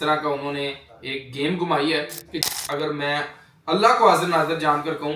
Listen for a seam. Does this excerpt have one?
yes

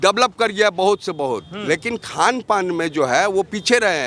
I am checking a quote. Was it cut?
no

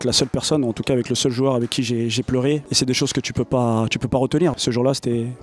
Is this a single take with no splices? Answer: no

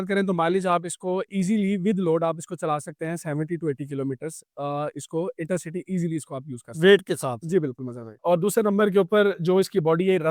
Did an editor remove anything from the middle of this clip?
yes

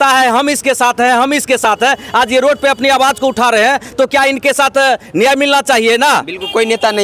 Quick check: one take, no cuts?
yes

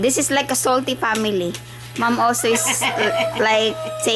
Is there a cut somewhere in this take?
no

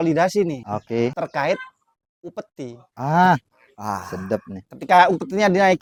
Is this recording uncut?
yes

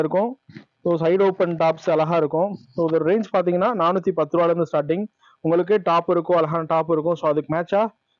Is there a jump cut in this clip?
no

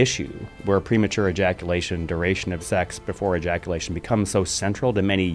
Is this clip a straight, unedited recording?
no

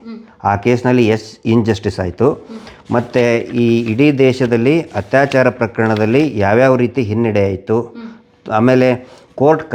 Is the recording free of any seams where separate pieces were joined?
yes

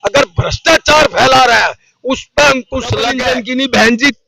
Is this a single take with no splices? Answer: no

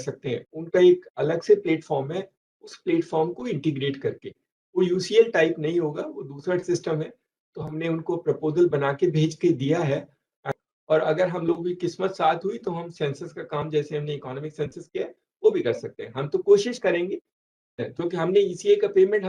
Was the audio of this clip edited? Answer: yes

